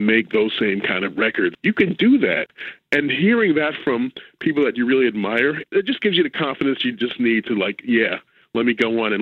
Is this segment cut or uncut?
cut